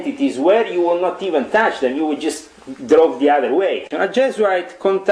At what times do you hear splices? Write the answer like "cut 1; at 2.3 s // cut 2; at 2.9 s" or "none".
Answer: cut 1; at 3.9 s